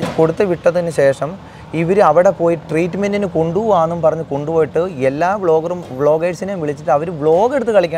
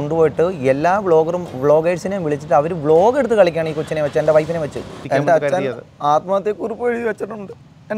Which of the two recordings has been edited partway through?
second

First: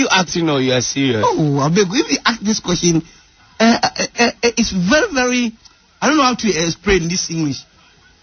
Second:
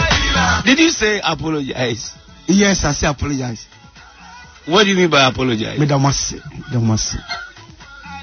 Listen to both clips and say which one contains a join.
second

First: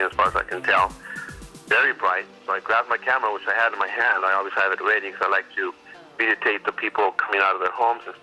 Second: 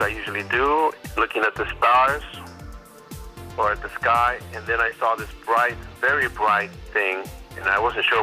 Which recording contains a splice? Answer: second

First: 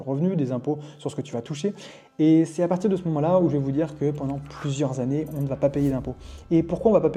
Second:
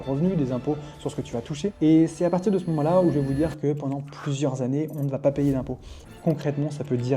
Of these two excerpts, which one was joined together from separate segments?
second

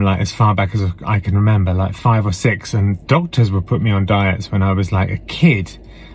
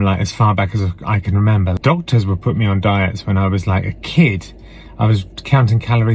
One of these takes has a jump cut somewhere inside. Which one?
second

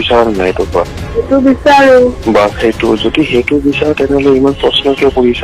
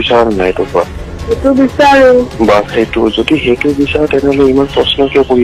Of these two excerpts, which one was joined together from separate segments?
first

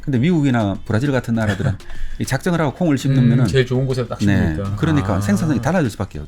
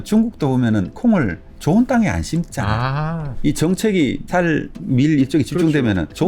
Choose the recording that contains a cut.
second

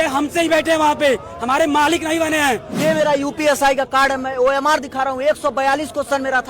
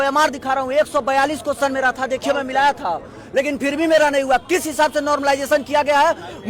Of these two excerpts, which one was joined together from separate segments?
first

